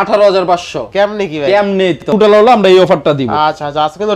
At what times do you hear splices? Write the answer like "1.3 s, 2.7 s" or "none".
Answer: 2.1 s